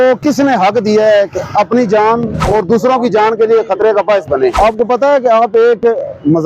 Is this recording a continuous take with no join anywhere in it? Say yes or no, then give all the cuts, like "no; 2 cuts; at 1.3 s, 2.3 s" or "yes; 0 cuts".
no; 2 cuts; at 2.4 s, 4.5 s